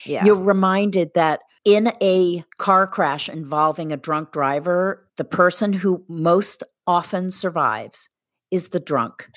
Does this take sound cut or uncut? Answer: cut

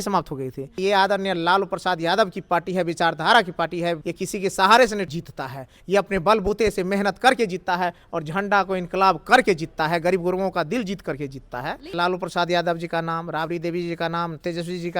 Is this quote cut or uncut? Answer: cut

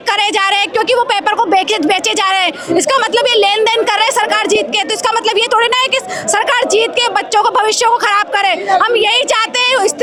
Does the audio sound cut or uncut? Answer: uncut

